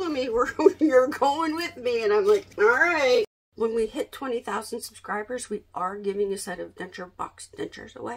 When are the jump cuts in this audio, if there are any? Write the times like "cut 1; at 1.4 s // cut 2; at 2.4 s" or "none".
cut 1; at 2.5 s // cut 2; at 3.4 s // cut 3; at 7.1 s